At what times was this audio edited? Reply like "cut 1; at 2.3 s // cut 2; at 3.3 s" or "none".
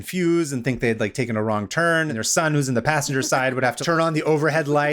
cut 1; at 2.1 s // cut 2; at 3.8 s